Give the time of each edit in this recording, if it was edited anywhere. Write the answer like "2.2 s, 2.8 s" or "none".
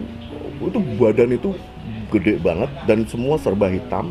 none